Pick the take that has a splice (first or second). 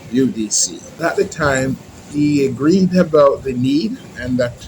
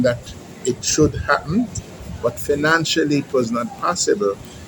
first